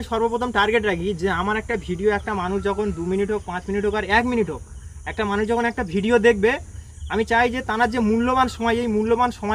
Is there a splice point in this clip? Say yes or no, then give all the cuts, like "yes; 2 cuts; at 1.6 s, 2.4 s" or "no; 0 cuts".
no; 0 cuts